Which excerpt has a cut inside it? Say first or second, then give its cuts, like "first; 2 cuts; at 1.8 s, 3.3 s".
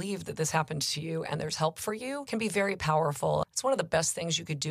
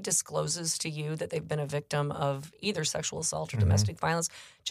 first; 2 cuts; at 2.2 s, 3.4 s